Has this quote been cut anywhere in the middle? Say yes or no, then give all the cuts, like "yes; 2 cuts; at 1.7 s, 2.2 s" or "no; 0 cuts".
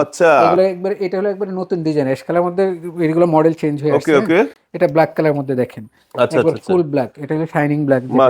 no; 0 cuts